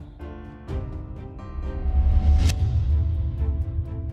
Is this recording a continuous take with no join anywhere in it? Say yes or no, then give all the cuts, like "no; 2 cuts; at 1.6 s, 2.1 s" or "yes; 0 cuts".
no; 1 cut; at 1.1 s